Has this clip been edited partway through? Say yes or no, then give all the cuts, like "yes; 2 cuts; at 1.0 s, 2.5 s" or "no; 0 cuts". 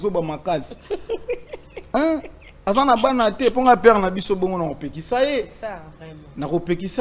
no; 0 cuts